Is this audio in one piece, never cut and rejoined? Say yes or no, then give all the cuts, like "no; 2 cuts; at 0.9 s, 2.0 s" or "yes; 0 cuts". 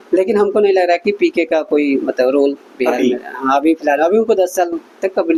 yes; 0 cuts